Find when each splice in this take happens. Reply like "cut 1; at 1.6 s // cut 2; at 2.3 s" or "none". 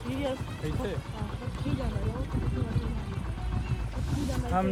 none